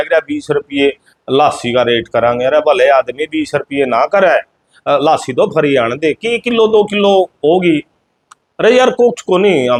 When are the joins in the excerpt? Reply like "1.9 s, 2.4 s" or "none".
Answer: none